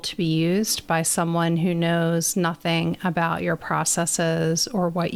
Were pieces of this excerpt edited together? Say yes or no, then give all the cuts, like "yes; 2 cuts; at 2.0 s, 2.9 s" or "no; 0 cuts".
no; 0 cuts